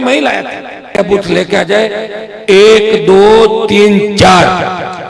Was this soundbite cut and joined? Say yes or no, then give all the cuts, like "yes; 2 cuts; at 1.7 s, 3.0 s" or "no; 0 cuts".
yes; 1 cut; at 1.0 s